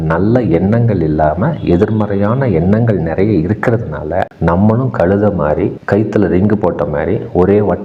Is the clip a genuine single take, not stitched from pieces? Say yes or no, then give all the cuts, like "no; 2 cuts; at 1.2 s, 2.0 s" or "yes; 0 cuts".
yes; 0 cuts